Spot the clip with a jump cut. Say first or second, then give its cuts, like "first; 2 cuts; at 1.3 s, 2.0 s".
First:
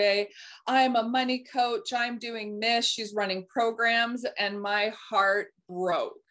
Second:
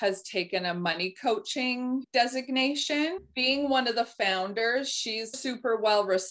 second; 3 cuts; at 2.1 s, 3.3 s, 5.4 s